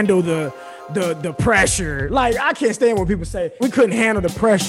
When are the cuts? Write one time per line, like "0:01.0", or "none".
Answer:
0:03.6

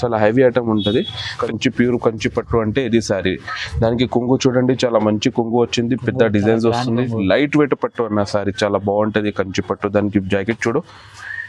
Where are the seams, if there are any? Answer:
0:01.4

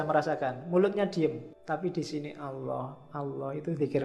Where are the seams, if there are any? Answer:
0:01.5

